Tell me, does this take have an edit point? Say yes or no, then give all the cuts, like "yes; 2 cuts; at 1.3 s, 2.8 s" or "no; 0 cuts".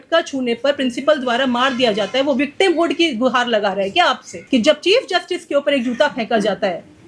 yes; 1 cut; at 4.3 s